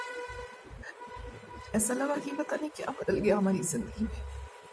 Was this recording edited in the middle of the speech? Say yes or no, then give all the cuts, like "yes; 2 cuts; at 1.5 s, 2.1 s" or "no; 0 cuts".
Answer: no; 0 cuts